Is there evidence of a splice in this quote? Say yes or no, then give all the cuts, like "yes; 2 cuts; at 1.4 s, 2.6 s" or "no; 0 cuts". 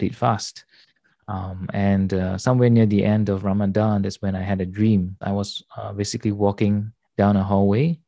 yes; 1 cut; at 5.2 s